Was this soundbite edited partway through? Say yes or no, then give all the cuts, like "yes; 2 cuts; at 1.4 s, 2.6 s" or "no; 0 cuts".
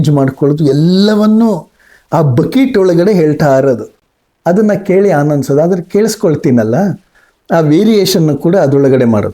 no; 0 cuts